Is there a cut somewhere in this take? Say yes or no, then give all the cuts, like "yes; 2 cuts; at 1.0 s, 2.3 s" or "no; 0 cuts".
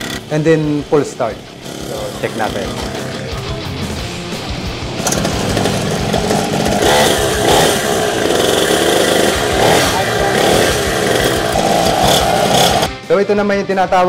yes; 3 cuts; at 6.8 s, 11.5 s, 12.9 s